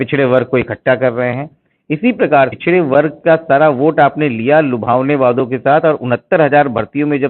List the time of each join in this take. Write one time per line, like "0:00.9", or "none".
0:02.5